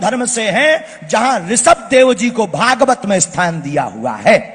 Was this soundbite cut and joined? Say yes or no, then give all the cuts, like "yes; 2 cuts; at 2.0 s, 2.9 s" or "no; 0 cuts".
no; 0 cuts